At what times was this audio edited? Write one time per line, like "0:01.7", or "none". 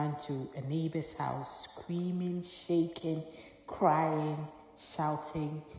none

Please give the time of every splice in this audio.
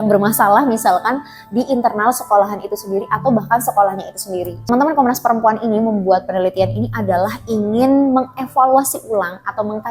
0:04.6

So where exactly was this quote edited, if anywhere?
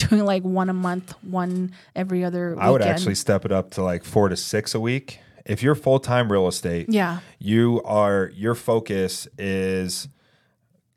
none

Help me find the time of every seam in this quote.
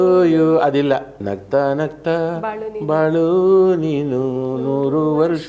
0:01.2

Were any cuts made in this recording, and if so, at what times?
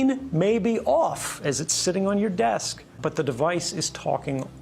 0:03.0

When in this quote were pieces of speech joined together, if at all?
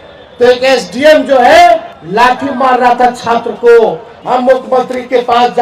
0:02.0
0:04.1

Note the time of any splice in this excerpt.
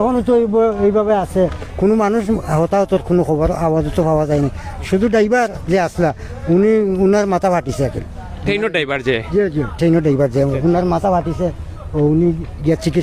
none

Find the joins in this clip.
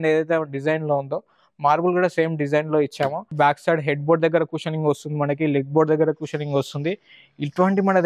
0:03.3

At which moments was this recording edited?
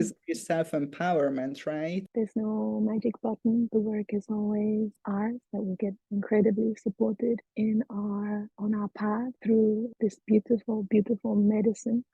0:02.0
0:03.7
0:09.4
0:09.9

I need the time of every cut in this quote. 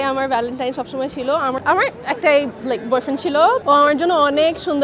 0:01.6
0:03.6

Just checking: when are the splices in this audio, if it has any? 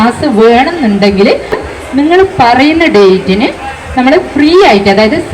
0:01.6

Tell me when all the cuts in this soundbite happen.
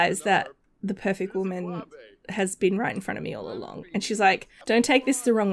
none

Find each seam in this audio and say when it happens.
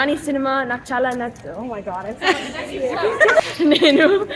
0:03.4

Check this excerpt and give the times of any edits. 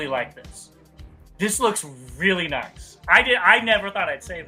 none

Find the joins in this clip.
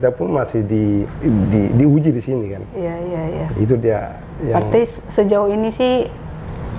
0:01.1

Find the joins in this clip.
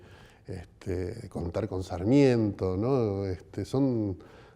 0:02.4

